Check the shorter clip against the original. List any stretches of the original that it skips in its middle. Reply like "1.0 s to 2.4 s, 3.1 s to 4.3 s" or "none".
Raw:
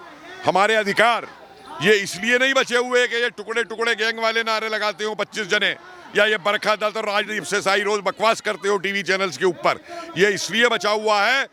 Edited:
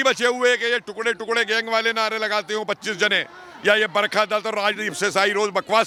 none